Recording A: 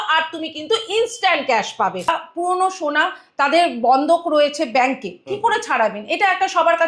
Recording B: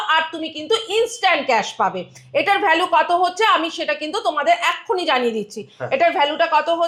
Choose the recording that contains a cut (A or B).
A